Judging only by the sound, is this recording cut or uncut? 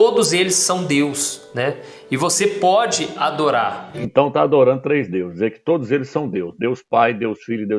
cut